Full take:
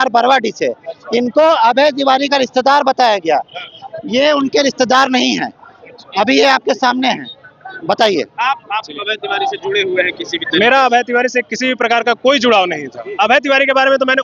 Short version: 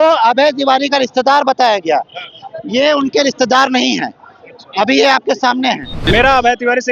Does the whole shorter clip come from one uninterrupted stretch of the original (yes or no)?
no